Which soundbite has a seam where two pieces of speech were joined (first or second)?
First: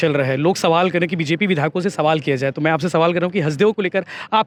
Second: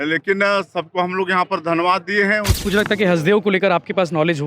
second